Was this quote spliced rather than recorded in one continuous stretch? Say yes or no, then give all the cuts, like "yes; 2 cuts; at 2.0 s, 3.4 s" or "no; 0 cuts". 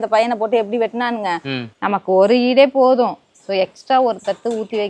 yes; 1 cut; at 1.7 s